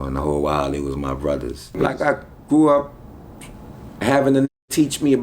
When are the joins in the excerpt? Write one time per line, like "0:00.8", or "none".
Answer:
0:01.7